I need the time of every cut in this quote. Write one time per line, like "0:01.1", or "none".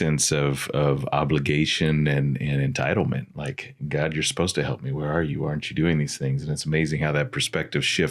none